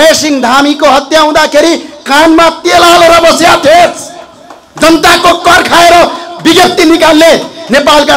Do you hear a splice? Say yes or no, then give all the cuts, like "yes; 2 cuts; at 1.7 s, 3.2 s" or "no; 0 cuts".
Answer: no; 0 cuts